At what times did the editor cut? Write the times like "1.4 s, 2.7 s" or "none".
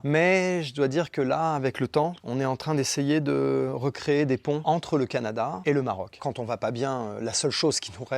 5.6 s, 6.2 s